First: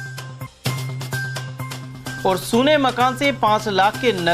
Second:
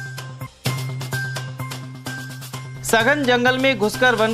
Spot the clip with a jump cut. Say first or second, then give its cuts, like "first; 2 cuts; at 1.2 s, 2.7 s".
first; 1 cut; at 1.5 s